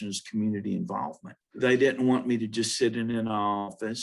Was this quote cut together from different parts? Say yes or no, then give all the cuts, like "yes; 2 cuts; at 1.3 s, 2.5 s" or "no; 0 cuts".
yes; 1 cut; at 1.4 s